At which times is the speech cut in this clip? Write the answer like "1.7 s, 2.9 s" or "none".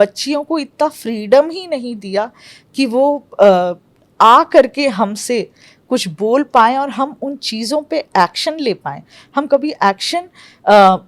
none

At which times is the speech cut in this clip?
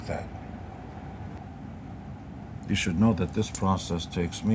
1.4 s

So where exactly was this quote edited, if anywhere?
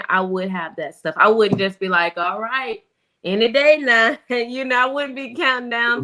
none

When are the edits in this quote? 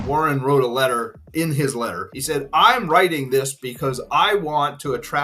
1.3 s, 2.1 s

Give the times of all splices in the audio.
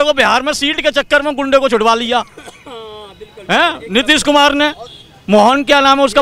none

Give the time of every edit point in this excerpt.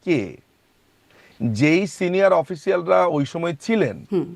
none

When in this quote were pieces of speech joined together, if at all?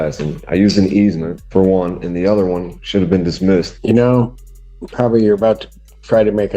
1.3 s, 3.7 s

